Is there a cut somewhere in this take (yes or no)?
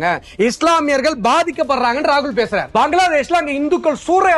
yes